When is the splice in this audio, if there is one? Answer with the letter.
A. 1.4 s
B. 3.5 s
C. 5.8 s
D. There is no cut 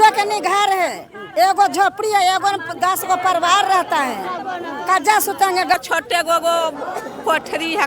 C